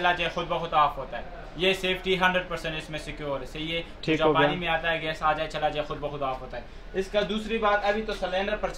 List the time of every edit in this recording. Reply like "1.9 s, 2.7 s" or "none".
none